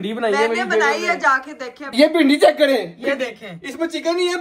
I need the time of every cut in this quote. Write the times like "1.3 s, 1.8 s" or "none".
1.8 s

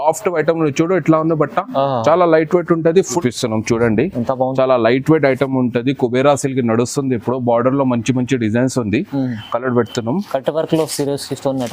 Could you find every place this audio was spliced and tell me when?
3.2 s

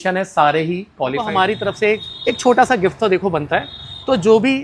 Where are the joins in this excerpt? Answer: 1.2 s

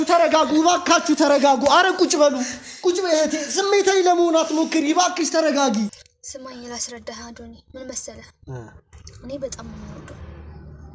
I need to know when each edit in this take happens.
5.9 s

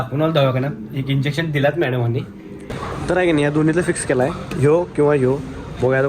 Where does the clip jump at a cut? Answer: 2.7 s

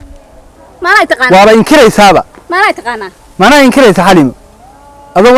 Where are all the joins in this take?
none

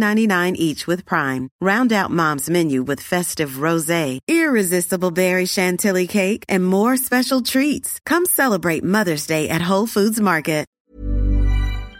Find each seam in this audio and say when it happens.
10.8 s

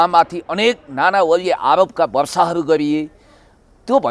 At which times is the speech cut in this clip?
none

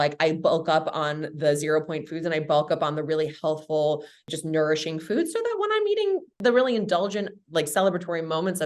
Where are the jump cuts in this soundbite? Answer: 4.3 s

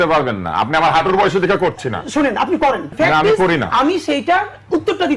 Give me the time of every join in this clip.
2.9 s

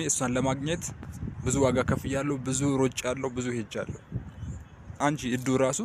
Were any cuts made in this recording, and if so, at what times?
4.9 s

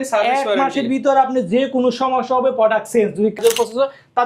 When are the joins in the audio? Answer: 3.4 s

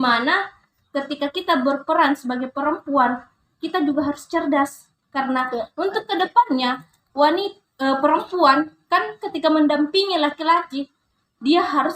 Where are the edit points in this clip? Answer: none

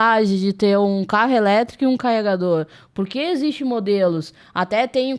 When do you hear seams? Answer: none

